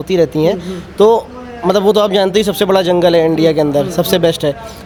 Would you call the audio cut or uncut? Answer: uncut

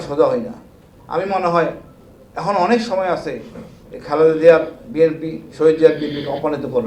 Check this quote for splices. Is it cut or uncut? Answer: uncut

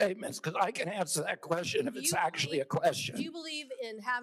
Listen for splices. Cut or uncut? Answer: uncut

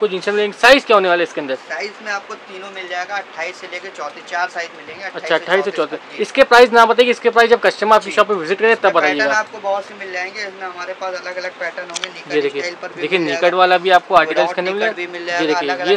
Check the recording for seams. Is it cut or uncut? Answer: uncut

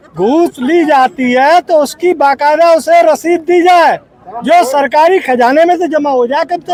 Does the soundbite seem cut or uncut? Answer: uncut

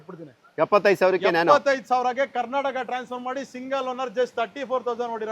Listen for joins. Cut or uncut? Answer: uncut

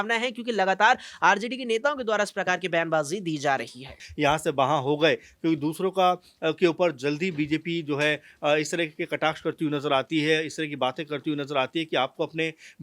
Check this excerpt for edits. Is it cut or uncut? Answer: cut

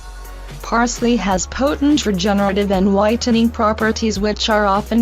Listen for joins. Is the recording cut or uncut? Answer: cut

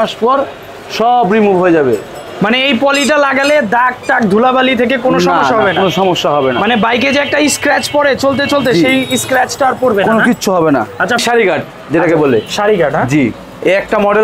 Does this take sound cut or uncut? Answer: cut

